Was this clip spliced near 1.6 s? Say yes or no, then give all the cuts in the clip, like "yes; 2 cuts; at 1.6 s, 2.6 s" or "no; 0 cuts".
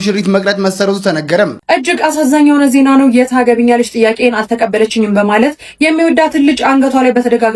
yes; 1 cut; at 1.6 s